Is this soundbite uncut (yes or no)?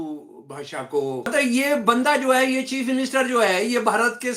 no